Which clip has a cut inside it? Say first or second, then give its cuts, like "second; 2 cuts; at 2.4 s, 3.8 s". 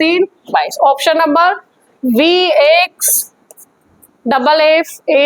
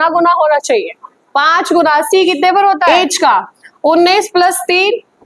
second; 1 cut; at 2.9 s